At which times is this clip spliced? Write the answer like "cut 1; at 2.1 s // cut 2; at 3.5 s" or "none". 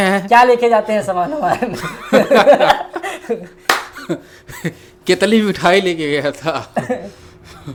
none